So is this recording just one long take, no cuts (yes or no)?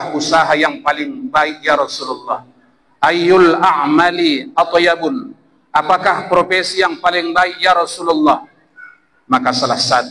yes